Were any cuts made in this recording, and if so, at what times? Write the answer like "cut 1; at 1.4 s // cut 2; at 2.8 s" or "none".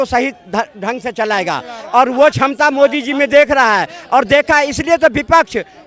none